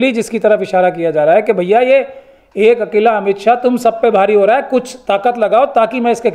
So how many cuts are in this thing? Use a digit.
0